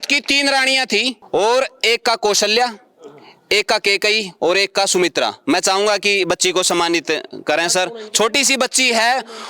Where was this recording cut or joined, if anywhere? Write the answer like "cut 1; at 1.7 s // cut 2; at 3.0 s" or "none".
cut 1; at 1.2 s